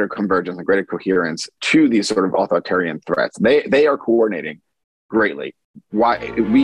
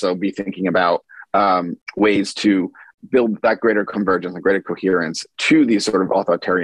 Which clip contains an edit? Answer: second; 2 cuts; at 1.8 s, 2.8 s

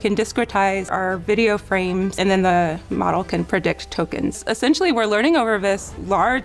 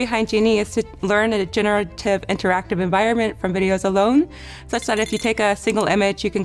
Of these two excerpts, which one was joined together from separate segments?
first; 3 cuts; at 0.9 s, 2.1 s, 4.4 s

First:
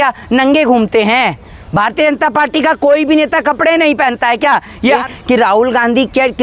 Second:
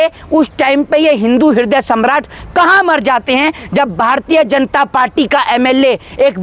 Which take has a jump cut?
first; 1 cut; at 5.0 s

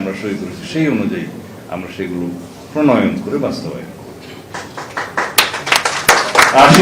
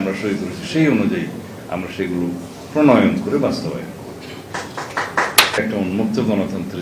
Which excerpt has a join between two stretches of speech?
second; 1 cut; at 5.6 s

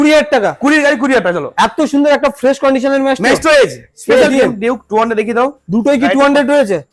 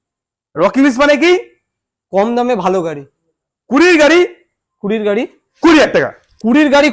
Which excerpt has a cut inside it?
first; 1 cut; at 4.3 s

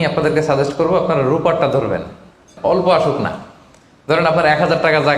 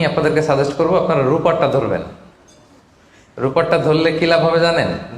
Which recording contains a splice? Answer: first; 1 cut; at 2.5 s

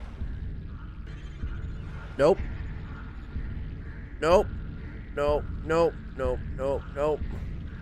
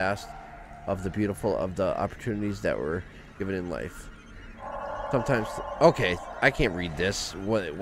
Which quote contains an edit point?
first; 1 cut; at 1.1 s

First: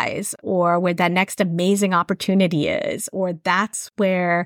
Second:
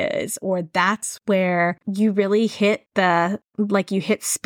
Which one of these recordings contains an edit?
second; 1 cut; at 2.9 s

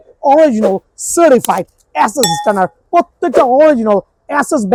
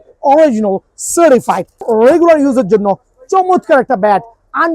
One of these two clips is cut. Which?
second; 1 cut; at 1.9 s

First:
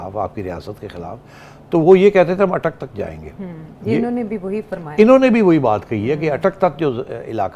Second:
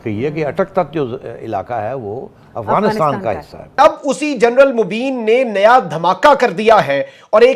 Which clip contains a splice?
second; 1 cut; at 3.8 s

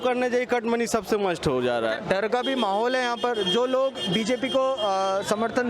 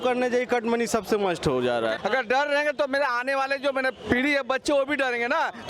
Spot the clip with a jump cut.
second; 1 cut; at 2.0 s

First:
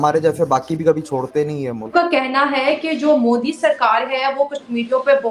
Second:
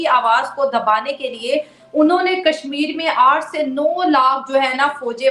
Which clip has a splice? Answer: first; 1 cut; at 1.9 s

